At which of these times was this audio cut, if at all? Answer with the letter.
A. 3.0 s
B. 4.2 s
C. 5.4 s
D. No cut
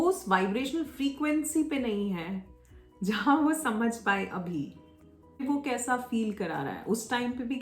C